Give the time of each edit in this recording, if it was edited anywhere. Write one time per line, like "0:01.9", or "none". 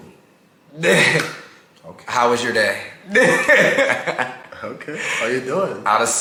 none